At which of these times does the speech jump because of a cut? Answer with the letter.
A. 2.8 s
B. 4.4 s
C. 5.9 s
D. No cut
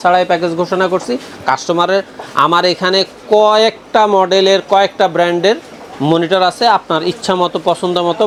D